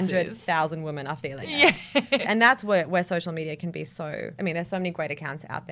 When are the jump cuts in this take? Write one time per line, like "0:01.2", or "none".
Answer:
0:02.2
0:04.3